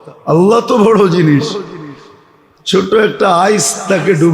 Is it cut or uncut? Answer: uncut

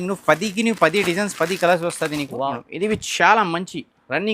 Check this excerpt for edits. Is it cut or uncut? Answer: cut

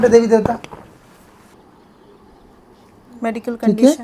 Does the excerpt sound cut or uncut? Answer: cut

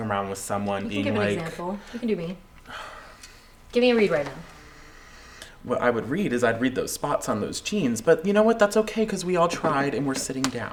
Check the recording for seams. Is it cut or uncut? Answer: uncut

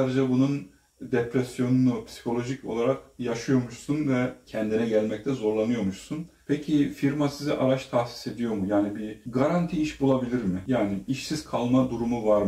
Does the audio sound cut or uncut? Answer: cut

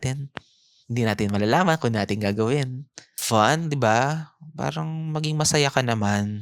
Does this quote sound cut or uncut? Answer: cut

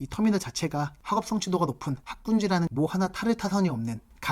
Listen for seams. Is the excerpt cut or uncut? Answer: cut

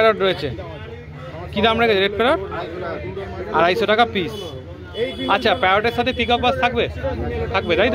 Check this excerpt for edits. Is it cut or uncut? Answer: uncut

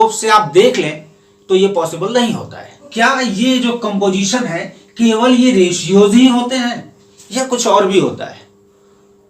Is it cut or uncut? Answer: cut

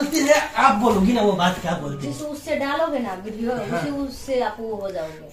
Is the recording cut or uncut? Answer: uncut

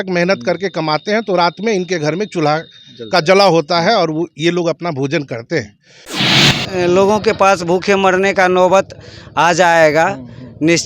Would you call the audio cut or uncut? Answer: cut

